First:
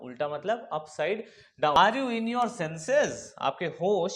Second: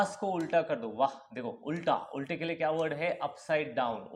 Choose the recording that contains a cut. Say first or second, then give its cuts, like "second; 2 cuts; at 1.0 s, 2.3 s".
first; 1 cut; at 1.8 s